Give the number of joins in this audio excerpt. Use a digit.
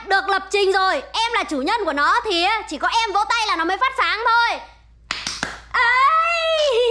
0